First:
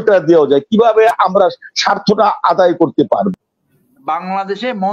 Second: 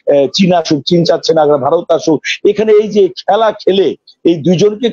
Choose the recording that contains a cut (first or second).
first